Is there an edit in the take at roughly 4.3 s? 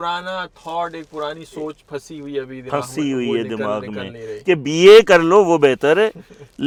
no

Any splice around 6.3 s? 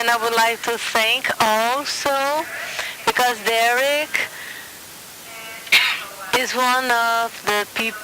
no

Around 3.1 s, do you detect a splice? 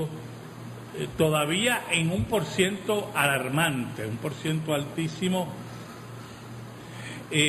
yes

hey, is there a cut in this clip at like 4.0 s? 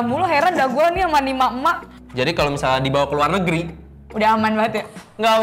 no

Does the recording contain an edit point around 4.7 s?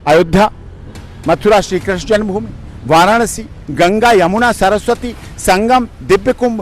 no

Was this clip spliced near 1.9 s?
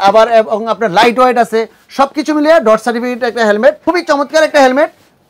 no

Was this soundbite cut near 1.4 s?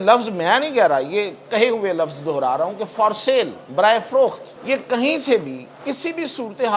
no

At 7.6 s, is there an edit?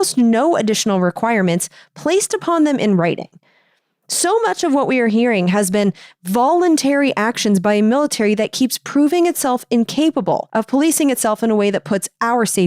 no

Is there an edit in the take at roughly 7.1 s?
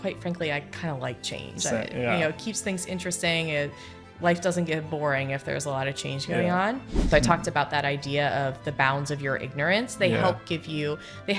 yes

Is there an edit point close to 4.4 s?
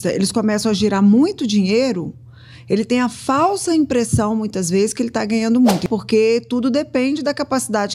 no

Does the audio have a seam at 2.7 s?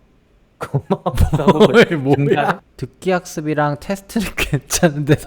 yes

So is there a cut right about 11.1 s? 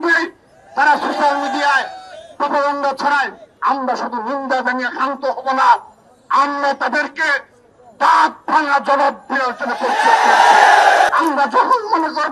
yes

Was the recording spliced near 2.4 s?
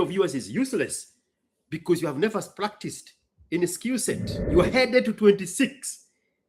no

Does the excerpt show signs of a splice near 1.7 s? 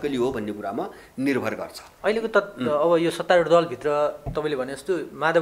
no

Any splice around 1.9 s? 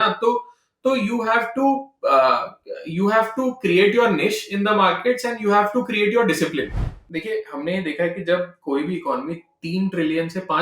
no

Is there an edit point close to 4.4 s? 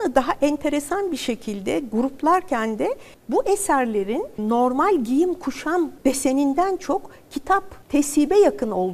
yes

